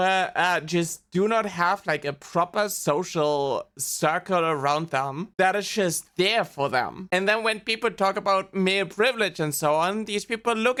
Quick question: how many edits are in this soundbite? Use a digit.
0